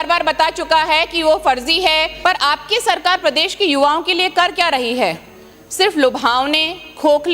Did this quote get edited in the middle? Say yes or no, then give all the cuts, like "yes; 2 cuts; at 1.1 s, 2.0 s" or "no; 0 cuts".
yes; 1 cut; at 2.1 s